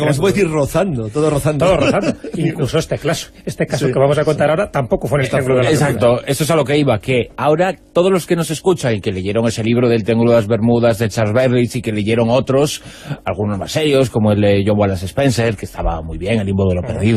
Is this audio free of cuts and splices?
no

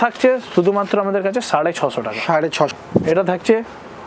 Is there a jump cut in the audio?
yes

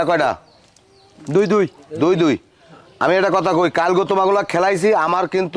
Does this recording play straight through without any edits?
yes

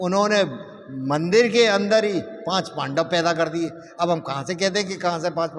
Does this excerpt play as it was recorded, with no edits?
yes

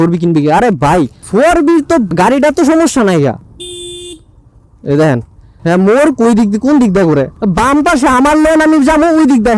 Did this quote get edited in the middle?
yes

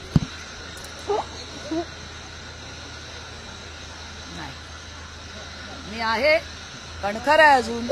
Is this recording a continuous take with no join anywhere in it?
yes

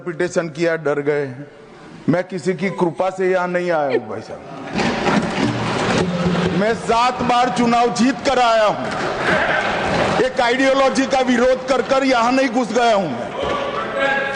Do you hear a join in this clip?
no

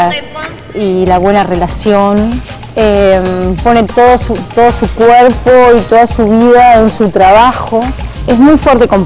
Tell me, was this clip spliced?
yes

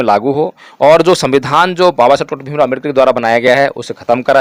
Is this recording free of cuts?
yes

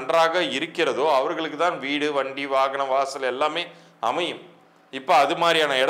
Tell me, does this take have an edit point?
no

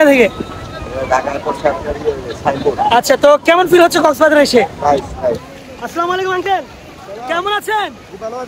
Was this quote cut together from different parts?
yes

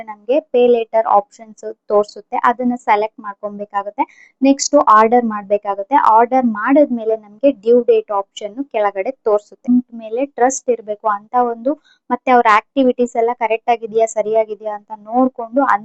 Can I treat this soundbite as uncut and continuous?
no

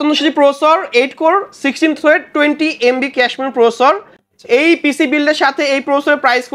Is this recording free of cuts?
yes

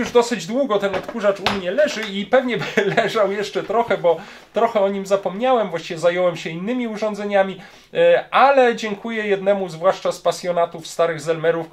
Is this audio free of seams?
yes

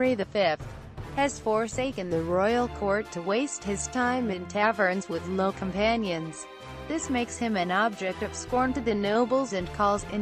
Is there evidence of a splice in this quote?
no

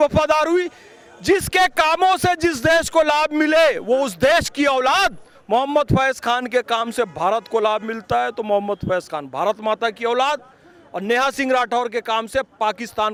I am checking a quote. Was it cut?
no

